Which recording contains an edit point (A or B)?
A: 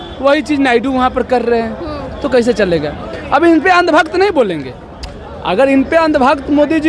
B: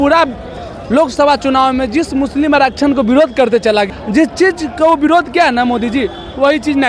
B